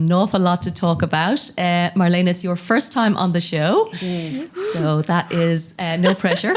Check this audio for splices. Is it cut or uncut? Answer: uncut